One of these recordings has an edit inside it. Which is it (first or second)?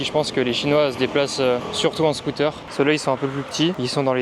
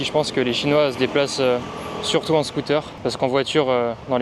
first